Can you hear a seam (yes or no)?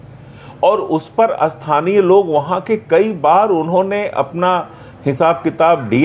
no